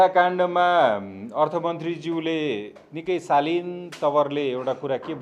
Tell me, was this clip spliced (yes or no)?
no